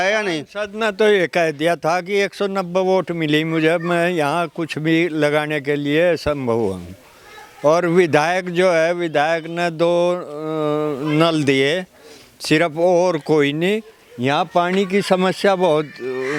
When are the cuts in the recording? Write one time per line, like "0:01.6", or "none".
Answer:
none